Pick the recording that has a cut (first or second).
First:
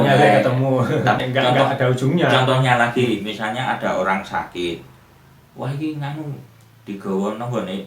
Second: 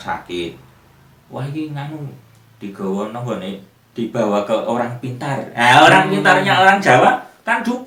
first